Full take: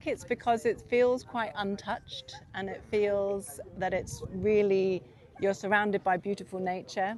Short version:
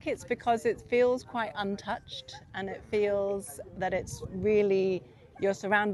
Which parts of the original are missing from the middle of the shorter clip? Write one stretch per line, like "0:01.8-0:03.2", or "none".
none